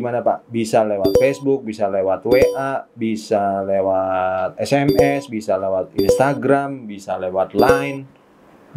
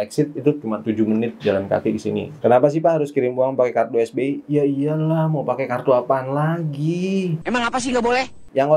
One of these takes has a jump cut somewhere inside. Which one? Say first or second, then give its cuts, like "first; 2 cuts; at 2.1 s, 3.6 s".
second; 2 cuts; at 2.3 s, 7.4 s